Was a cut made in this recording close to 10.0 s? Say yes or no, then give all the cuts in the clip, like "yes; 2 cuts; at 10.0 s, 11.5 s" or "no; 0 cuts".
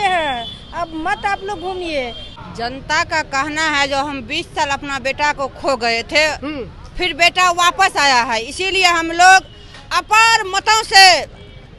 no; 1 cut; at 2.2 s